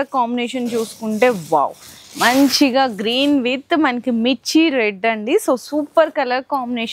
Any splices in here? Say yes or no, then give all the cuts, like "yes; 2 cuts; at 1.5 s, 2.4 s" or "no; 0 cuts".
no; 0 cuts